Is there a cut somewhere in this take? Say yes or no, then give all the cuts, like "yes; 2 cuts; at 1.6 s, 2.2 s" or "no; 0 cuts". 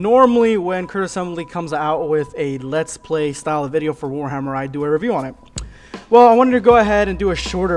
yes; 1 cut; at 5.9 s